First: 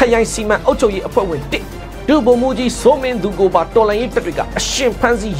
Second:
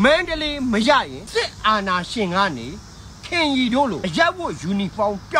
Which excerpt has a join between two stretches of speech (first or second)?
second